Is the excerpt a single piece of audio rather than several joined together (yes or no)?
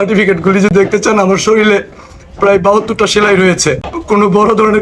no